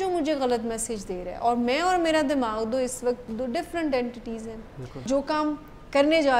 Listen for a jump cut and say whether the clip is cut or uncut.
cut